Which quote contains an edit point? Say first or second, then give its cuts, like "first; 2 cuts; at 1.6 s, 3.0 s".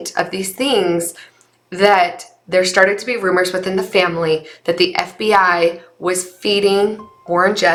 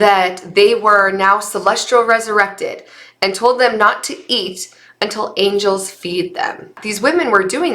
second; 1 cut; at 6.8 s